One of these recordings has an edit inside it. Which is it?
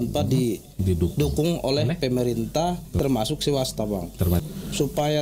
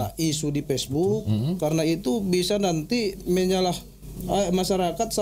first; 2 cuts; at 3.0 s, 4.4 s

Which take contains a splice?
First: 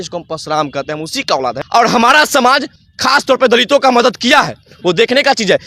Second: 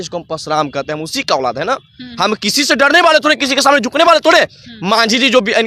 first; 1 cut; at 1.6 s

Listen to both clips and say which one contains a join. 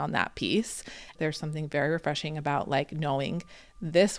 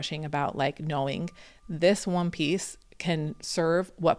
first; 1 cut; at 1.1 s

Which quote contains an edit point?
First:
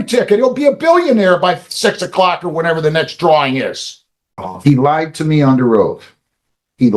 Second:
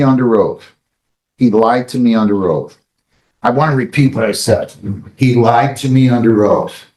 first; 1 cut; at 4.4 s

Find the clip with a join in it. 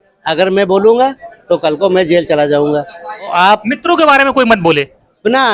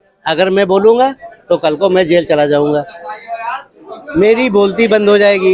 first; 1 cut; at 3.3 s

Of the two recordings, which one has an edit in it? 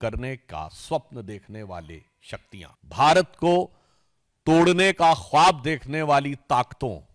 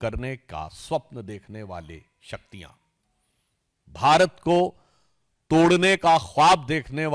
first; 1 cut; at 2.8 s

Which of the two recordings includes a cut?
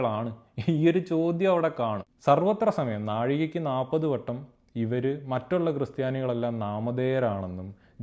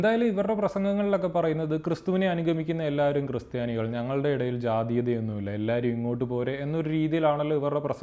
first; 1 cut; at 2.1 s

